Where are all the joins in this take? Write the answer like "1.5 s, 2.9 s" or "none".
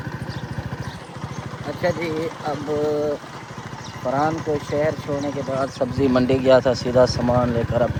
none